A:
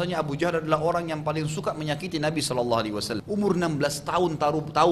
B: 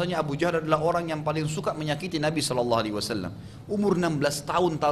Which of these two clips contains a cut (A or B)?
A